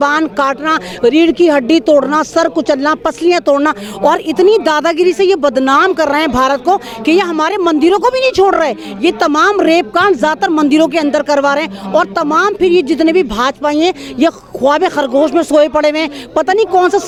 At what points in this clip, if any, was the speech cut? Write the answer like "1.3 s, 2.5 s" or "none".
none